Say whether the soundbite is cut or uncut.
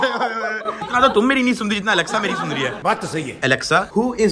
cut